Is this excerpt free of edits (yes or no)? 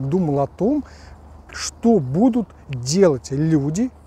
yes